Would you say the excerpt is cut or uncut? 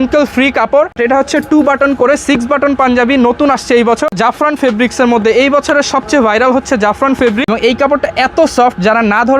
cut